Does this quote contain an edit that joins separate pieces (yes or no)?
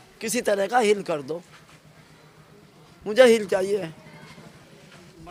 no